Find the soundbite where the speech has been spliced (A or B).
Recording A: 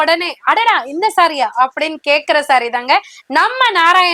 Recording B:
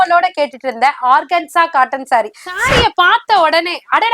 B